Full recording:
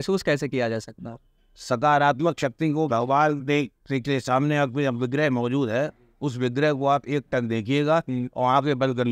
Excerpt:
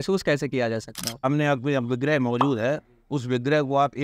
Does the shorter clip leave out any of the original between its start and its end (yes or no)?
yes